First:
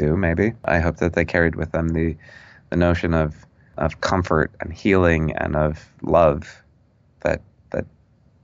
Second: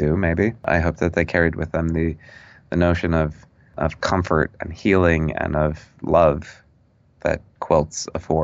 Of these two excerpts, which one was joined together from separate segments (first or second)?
second